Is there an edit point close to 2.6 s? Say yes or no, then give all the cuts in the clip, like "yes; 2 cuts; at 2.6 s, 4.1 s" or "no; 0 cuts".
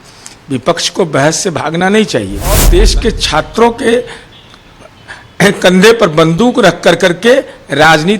yes; 1 cut; at 2.6 s